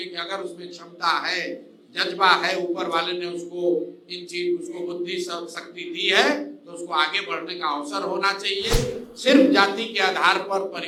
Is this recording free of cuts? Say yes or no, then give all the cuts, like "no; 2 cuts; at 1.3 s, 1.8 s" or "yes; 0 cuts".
yes; 0 cuts